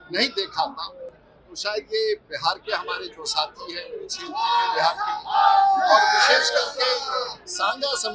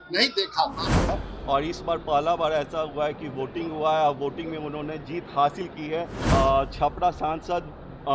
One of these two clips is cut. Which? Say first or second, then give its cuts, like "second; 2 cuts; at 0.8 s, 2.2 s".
second; 2 cuts; at 1.1 s, 6.2 s